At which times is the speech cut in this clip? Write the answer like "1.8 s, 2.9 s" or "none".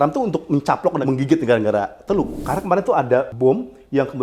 1.0 s, 2.4 s, 3.3 s